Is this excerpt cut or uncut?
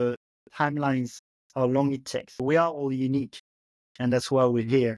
cut